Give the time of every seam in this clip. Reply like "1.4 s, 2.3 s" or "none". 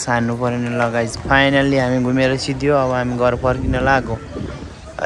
none